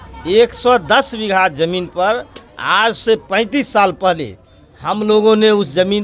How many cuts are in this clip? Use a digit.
0